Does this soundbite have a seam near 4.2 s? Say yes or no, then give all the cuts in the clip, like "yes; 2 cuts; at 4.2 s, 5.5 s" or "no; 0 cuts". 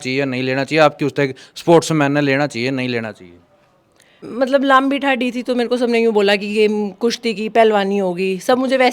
yes; 1 cut; at 4.2 s